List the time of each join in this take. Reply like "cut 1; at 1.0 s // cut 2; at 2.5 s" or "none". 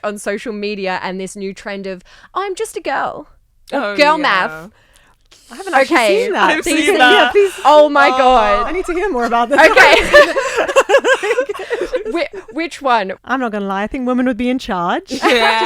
cut 1; at 13.2 s